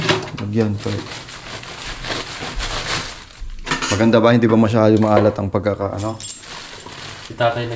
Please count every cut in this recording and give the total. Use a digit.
0